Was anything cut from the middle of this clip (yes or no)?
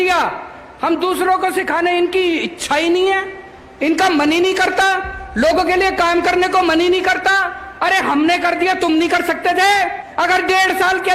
yes